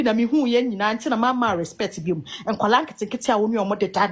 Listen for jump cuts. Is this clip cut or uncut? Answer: uncut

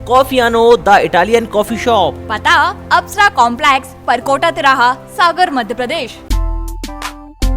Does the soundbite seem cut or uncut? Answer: cut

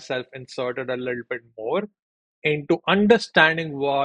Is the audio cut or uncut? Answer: uncut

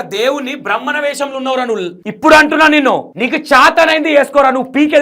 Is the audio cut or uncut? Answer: cut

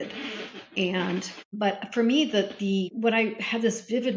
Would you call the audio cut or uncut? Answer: cut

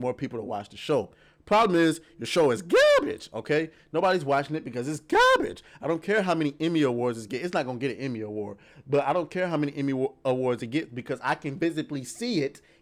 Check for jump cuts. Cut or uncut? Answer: uncut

